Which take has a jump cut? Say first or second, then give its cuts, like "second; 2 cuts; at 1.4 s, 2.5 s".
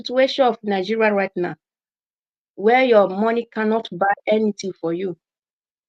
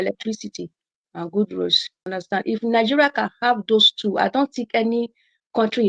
second; 1 cut; at 2.1 s